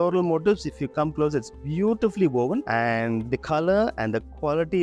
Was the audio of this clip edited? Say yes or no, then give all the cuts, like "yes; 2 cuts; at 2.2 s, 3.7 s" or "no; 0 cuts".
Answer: no; 0 cuts